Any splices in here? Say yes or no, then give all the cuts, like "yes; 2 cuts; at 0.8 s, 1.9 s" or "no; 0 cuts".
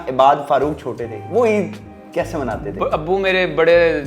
no; 0 cuts